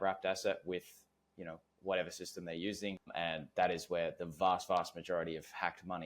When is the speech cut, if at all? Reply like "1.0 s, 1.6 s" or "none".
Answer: 3.0 s